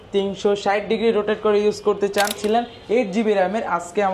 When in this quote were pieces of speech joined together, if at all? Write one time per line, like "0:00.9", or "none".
0:02.4